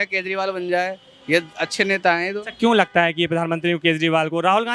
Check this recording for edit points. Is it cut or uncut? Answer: uncut